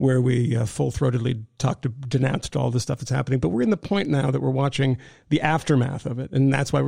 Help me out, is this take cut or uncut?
uncut